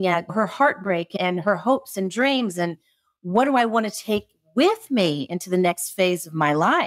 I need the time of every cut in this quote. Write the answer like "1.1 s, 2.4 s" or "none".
1.1 s